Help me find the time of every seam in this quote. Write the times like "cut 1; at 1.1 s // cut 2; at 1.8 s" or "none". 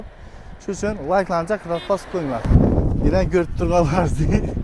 cut 1; at 2.5 s